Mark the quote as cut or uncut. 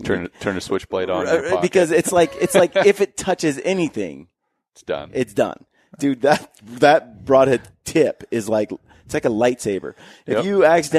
uncut